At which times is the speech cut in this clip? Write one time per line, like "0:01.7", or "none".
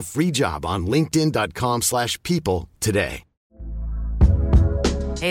0:03.4

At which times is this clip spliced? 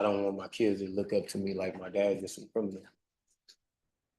0:03.0

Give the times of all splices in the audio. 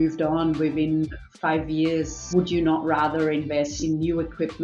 0:02.2
0:03.7

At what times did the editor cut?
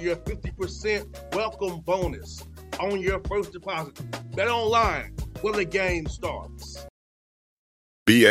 0:06.8

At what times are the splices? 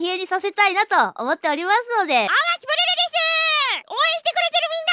0:02.3
0:03.8

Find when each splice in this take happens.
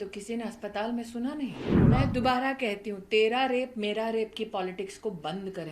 0:01.7

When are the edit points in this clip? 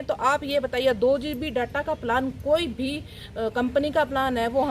none

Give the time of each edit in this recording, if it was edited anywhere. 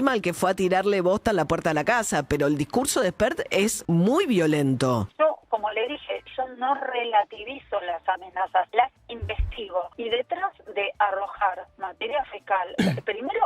0:03.7
0:05.1
0:08.7
0:09.9

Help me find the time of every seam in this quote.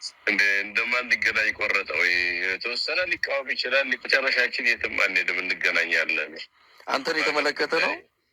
0:03.9

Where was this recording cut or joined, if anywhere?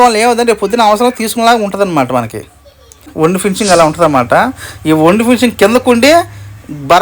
0:03.1

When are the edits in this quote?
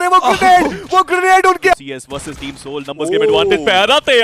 0:01.7

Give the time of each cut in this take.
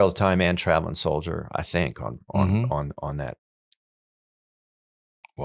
none

